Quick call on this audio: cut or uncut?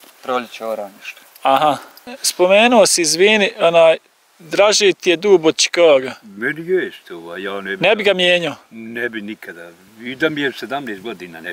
cut